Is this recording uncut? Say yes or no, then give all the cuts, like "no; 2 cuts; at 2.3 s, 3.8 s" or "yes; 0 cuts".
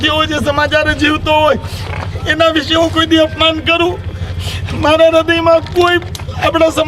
yes; 0 cuts